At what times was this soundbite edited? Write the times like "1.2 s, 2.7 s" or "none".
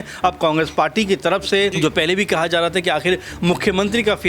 1.7 s